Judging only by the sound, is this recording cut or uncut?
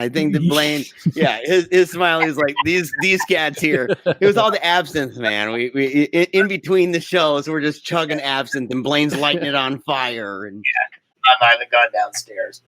cut